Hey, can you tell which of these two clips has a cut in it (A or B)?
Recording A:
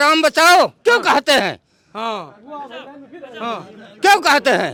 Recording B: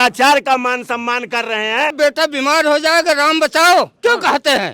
B